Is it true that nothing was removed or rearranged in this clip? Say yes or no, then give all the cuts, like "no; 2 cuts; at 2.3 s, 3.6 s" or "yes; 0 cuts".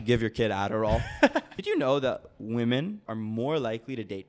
no; 2 cuts; at 1.5 s, 3.0 s